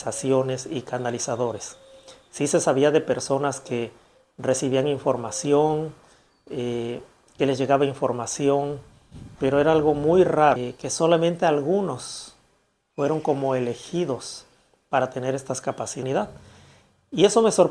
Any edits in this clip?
yes; 2 cuts; at 10.6 s, 16.0 s

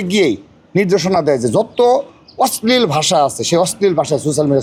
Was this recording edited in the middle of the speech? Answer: no; 0 cuts

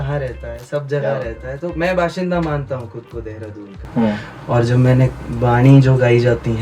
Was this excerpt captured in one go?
no; 1 cut; at 3.8 s

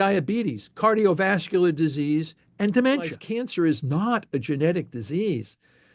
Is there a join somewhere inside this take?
yes; 1 cut; at 3.2 s

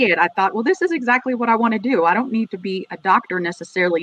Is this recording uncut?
yes; 0 cuts

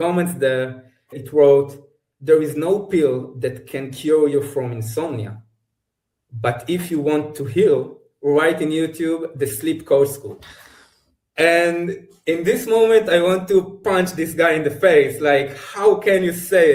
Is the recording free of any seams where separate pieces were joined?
no; 1 cut; at 1.2 s

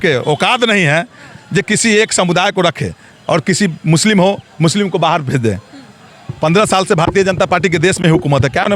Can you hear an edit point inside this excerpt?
no; 0 cuts

